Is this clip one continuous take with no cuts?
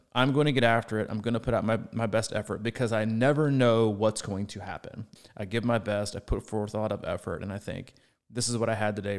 no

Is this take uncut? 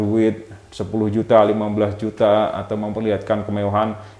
yes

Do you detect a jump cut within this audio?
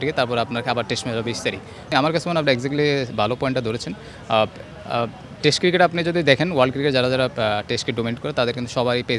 yes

